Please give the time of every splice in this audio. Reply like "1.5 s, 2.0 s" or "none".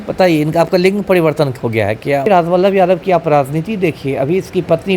2.3 s